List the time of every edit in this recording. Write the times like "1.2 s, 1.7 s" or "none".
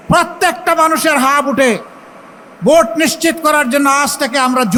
none